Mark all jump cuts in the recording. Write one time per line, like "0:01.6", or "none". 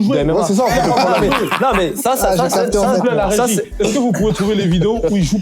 none